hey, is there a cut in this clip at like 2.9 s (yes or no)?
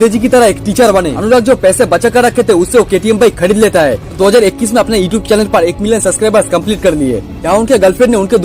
no